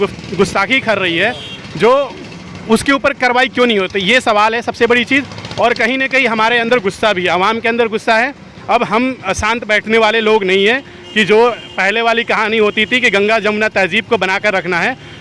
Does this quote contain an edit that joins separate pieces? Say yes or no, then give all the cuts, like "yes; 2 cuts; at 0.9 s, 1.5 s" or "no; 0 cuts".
no; 0 cuts